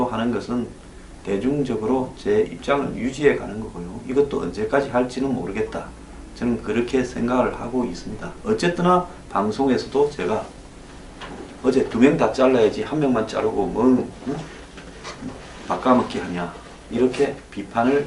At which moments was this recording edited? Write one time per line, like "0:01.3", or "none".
none